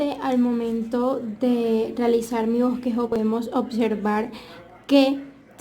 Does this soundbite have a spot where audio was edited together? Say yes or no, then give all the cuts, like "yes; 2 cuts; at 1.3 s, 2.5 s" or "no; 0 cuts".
yes; 1 cut; at 3.2 s